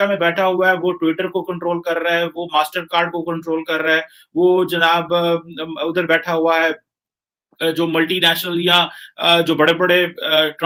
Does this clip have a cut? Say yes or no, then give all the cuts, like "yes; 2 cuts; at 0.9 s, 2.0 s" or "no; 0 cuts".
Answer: no; 0 cuts